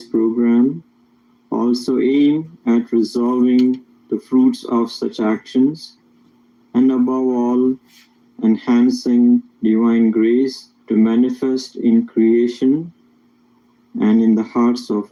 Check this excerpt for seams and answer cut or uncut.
uncut